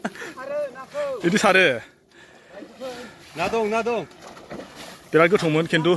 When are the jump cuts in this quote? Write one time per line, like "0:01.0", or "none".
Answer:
none